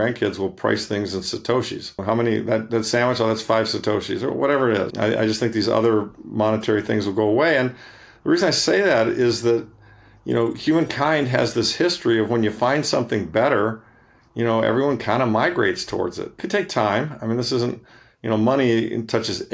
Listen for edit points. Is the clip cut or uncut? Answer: cut